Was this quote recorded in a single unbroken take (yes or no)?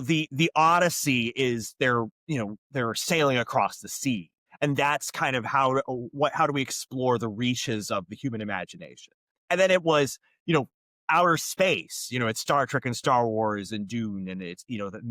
yes